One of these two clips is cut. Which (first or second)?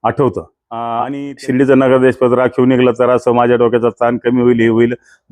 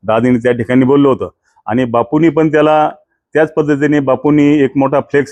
first